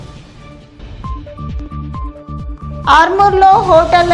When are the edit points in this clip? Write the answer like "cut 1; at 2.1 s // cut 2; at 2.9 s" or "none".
cut 1; at 1.2 s // cut 2; at 2.6 s